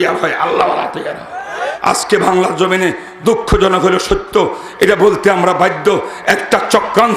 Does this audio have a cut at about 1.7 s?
yes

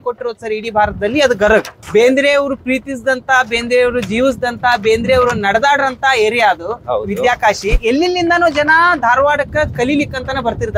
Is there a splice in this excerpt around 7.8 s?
yes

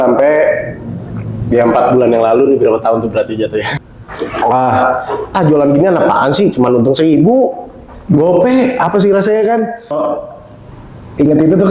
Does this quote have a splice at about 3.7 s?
yes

